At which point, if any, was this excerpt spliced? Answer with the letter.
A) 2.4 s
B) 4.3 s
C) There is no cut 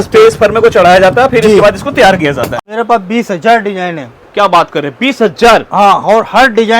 A